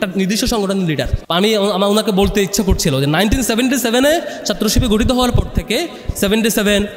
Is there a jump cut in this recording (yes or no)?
yes